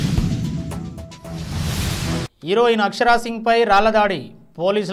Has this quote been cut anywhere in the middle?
yes; 1 cut; at 2.3 s

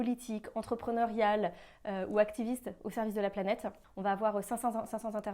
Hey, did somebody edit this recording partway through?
yes; 1 cut; at 3.8 s

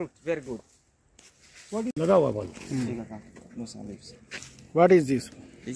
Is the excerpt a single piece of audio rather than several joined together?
no; 1 cut; at 1.9 s

